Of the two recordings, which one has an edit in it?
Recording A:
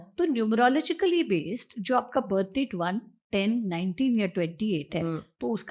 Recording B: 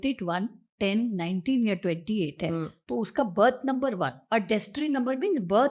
B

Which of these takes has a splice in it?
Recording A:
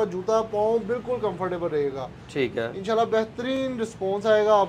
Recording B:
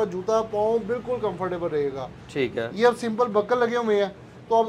B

